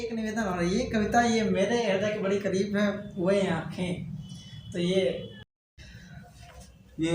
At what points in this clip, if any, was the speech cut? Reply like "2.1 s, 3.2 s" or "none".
5.4 s

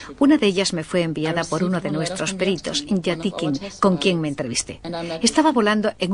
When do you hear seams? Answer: 1.8 s

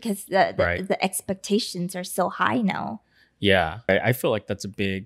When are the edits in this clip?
3.9 s

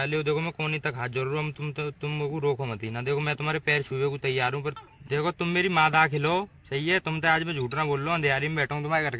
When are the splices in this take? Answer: 4.8 s

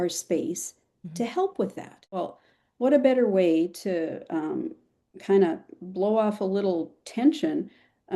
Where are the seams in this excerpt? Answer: 2.2 s

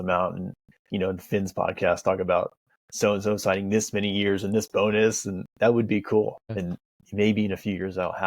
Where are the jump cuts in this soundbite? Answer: 6.6 s

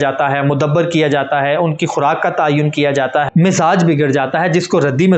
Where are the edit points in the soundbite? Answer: 3.3 s

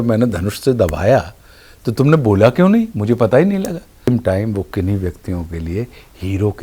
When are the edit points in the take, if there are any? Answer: 4.1 s

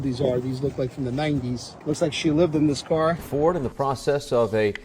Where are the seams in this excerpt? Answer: 1.7 s, 3.2 s

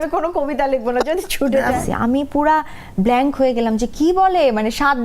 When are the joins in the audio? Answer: 1.8 s

